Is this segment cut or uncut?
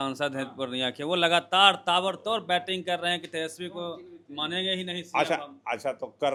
uncut